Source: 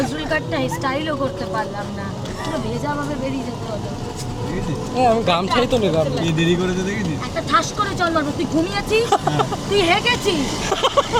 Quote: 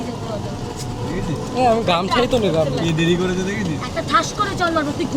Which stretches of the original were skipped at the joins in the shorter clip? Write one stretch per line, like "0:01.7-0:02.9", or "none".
none